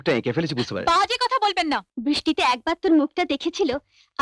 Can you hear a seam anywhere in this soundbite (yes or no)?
yes